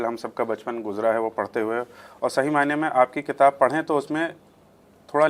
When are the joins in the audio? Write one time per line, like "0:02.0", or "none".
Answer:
none